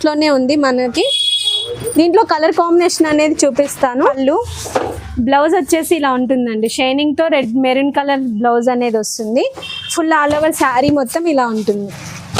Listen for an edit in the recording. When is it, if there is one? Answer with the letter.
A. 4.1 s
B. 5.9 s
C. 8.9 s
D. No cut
A